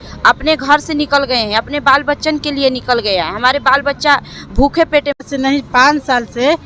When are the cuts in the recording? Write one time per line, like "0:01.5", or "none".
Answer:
0:05.2